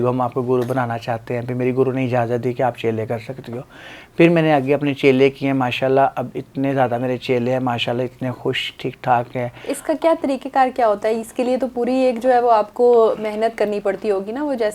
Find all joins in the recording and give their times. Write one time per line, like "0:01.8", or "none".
none